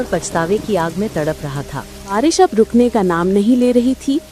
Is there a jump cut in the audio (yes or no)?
yes